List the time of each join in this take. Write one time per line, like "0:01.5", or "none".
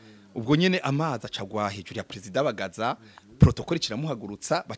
none